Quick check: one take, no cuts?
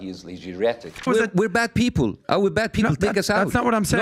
no; 1 cut; at 1.1 s

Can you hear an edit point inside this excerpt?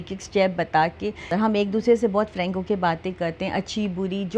yes; 1 cut; at 1.3 s

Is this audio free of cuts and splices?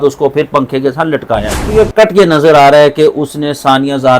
no; 1 cut; at 1.6 s

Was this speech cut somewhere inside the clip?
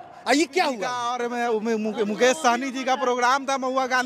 yes; 1 cut; at 1.1 s

